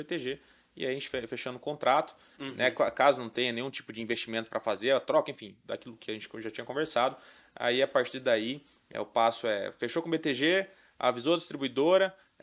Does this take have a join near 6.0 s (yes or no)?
no